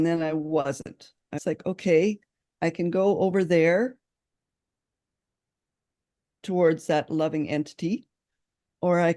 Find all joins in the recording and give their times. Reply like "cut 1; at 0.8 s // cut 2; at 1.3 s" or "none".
cut 1; at 1.4 s